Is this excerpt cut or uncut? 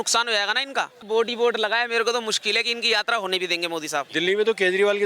cut